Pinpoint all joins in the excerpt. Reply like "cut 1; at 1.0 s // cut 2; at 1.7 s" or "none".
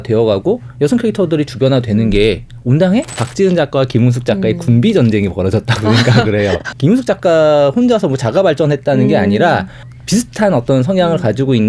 cut 1; at 3.2 s // cut 2; at 6.7 s // cut 3; at 9.9 s